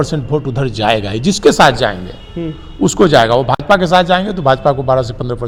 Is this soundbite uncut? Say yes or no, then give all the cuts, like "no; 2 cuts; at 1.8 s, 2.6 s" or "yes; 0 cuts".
yes; 0 cuts